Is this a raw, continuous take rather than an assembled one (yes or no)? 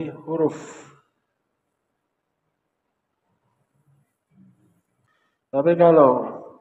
no